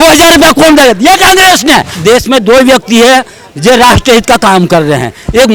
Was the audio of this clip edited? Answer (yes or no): yes